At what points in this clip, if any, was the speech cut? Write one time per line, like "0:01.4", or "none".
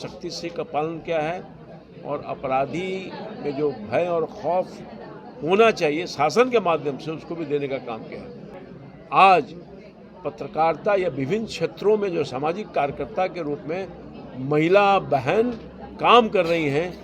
0:08.5